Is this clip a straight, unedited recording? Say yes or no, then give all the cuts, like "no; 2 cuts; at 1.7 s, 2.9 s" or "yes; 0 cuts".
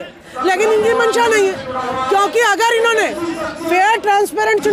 yes; 0 cuts